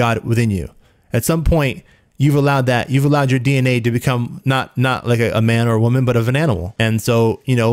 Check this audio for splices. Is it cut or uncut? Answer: cut